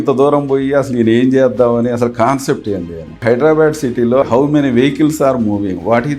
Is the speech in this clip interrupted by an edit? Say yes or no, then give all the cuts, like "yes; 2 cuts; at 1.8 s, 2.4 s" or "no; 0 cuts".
yes; 2 cuts; at 3.2 s, 4.2 s